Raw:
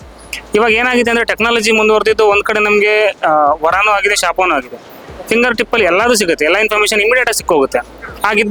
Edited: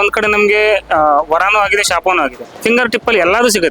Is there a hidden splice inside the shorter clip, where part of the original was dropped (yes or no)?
yes